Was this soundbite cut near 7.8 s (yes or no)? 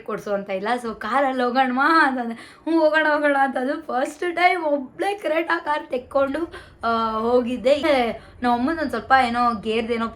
yes